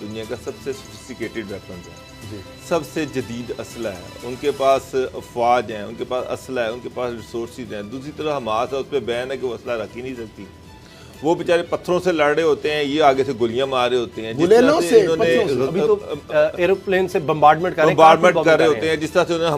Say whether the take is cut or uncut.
uncut